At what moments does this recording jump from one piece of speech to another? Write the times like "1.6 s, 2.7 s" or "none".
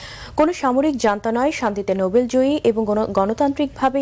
3.1 s